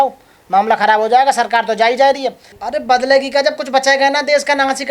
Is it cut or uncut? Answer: cut